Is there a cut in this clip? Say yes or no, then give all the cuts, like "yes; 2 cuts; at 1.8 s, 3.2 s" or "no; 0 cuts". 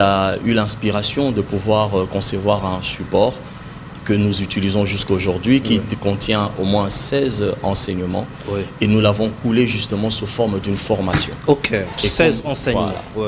no; 0 cuts